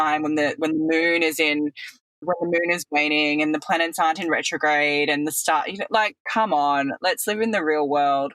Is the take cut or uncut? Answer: cut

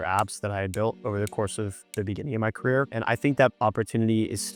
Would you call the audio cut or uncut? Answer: uncut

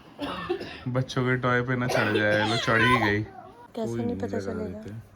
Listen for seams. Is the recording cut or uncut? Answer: cut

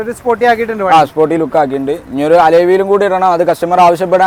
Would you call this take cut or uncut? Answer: uncut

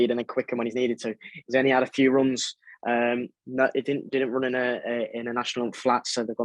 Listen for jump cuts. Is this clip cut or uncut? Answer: uncut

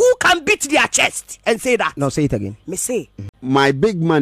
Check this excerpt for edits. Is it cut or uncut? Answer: cut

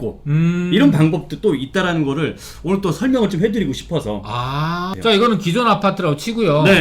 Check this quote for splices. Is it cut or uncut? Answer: cut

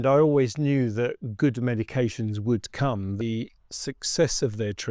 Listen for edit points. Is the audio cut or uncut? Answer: cut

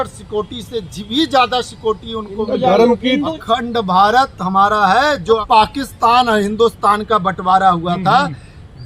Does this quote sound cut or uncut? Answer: cut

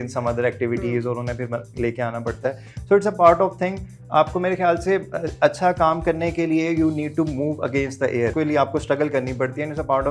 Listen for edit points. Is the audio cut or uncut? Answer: cut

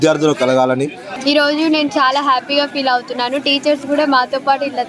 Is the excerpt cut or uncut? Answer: cut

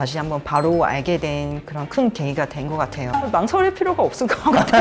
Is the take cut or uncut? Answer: cut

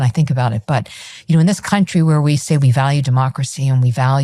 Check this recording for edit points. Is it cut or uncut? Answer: uncut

